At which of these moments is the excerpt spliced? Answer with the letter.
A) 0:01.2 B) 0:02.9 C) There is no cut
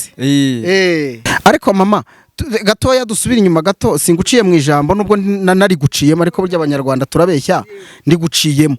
A